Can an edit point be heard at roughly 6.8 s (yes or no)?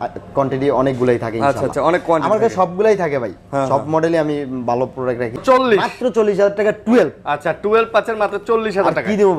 no